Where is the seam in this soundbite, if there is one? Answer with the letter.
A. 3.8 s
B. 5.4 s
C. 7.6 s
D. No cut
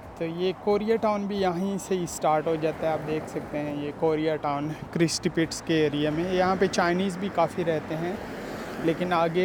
D